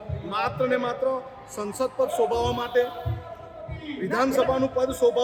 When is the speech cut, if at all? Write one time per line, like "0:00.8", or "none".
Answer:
none